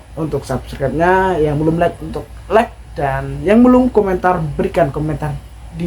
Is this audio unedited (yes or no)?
yes